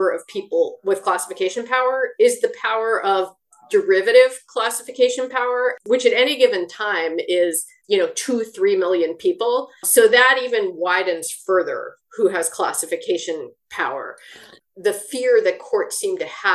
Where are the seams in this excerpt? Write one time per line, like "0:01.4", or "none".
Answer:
0:05.8
0:07.7
0:09.8
0:14.5